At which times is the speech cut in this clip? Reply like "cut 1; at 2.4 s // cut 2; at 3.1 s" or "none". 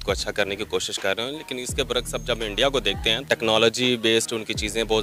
cut 1; at 3.2 s